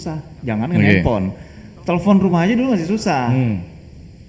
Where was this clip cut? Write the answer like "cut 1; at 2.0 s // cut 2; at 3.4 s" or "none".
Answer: none